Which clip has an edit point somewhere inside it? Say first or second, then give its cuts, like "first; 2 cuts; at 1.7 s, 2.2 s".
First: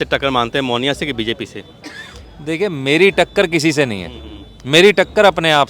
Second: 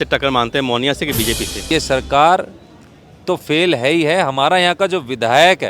second; 1 cut; at 1.6 s